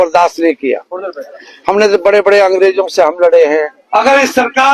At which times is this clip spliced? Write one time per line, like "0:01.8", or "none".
0:03.8